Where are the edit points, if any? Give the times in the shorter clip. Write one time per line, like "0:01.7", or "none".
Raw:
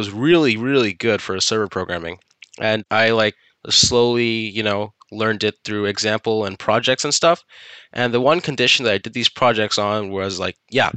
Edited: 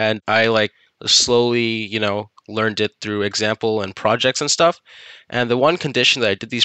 none